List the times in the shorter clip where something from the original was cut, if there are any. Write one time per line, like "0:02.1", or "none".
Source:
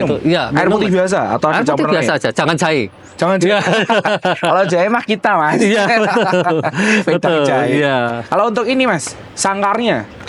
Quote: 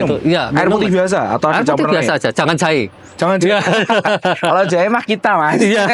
none